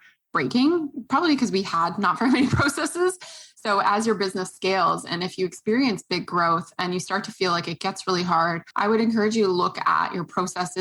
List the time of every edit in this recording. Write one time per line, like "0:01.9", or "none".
0:08.6